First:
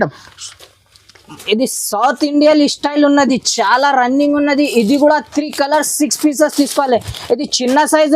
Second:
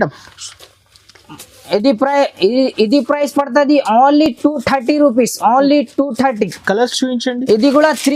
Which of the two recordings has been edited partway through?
first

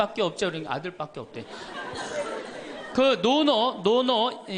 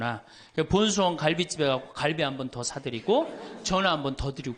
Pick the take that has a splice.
first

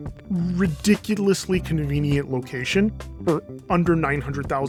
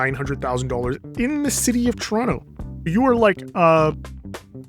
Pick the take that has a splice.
second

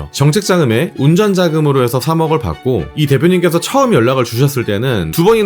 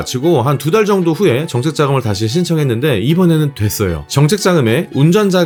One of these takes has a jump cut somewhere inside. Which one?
first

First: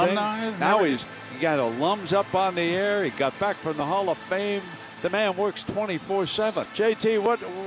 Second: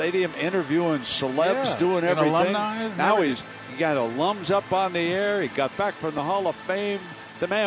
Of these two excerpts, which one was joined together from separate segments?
first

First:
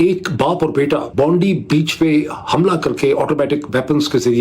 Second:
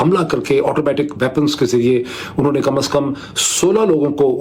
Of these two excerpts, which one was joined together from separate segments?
first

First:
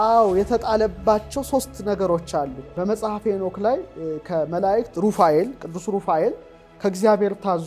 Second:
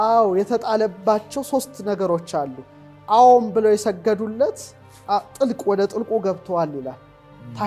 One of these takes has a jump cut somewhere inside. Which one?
first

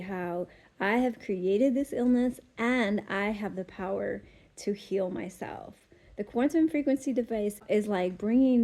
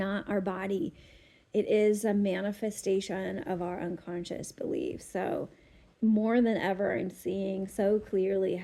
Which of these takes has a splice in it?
first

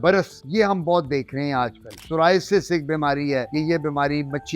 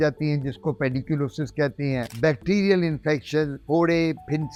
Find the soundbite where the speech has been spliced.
first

